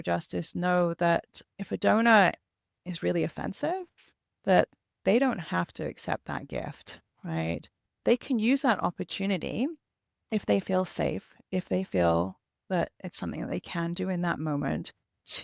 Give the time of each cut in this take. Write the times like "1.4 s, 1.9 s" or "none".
8.0 s